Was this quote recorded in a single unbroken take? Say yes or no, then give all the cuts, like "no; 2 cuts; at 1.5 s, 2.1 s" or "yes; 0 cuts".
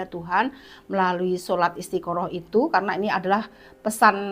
yes; 0 cuts